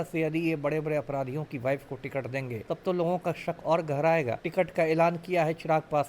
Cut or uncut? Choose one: cut